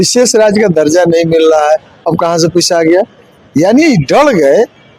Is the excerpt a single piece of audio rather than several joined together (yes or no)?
yes